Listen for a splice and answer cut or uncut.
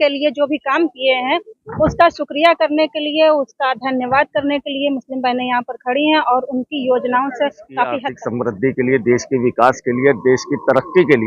cut